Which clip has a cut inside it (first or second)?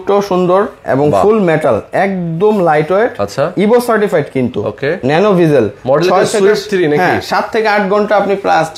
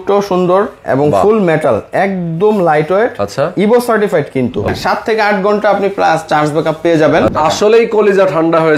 second